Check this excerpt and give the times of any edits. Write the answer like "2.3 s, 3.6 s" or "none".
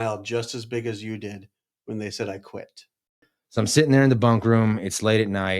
3.3 s